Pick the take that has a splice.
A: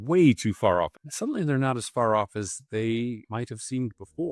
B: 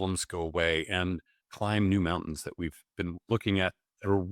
A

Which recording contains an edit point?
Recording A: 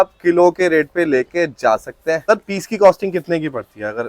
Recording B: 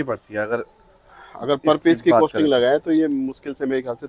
A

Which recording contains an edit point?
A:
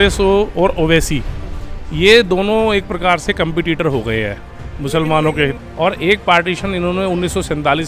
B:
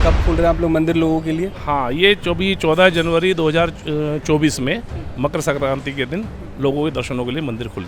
A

